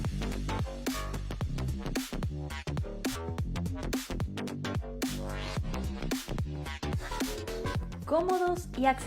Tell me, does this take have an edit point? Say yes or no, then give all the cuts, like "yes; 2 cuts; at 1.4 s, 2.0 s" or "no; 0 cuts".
yes; 1 cut; at 3.2 s